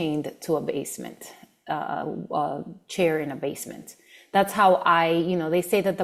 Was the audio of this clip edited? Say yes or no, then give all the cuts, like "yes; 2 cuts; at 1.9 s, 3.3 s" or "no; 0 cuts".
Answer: no; 0 cuts